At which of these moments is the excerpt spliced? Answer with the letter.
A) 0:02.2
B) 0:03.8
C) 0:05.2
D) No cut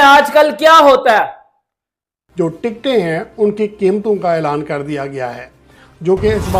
A